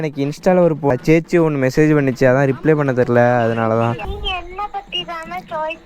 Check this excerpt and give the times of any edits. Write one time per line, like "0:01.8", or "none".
0:00.9
0:04.1